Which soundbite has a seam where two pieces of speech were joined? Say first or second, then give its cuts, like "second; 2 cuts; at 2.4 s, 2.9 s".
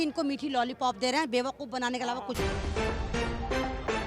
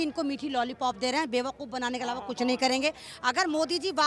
first; 1 cut; at 2.3 s